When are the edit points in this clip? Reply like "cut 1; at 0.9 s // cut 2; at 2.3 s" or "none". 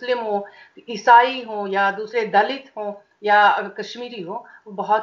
none